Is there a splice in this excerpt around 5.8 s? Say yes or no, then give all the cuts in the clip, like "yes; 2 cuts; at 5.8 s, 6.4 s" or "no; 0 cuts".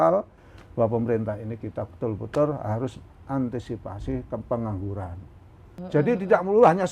yes; 1 cut; at 5.8 s